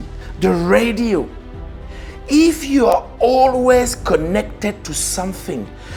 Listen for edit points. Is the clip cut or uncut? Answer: uncut